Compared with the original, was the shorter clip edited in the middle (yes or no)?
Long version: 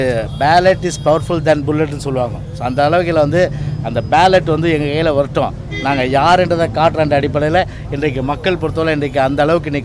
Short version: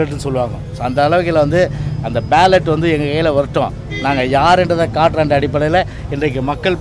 no